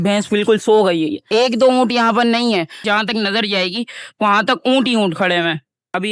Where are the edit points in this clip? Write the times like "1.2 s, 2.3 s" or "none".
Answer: 1.2 s